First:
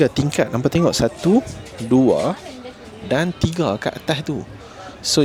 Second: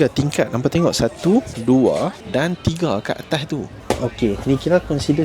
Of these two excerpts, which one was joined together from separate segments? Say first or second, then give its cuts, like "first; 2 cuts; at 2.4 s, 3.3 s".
second; 3 cuts; at 1.5 s, 2.2 s, 3.8 s